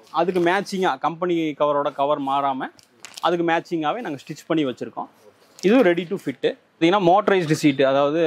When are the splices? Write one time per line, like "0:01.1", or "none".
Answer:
0:06.6